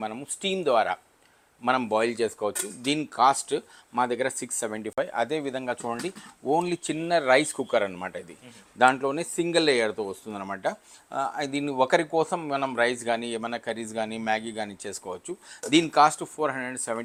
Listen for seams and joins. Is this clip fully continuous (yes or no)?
yes